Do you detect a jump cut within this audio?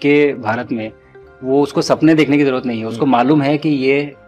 no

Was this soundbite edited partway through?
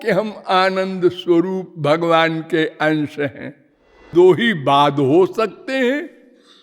yes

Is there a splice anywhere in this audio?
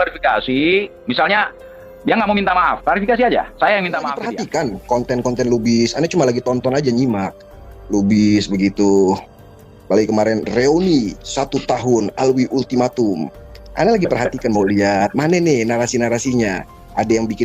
yes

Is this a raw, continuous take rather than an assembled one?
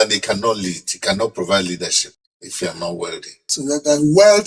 no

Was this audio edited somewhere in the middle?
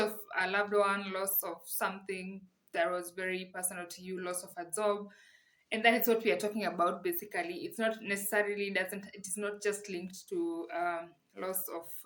no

